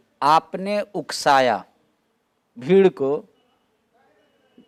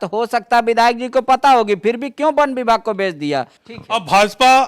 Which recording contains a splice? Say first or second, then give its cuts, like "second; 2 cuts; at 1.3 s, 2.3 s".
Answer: second; 1 cut; at 3.6 s